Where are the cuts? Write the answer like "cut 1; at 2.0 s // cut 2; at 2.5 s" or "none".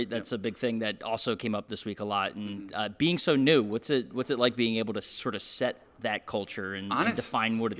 none